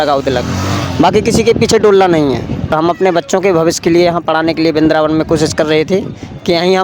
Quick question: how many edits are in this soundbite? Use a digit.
1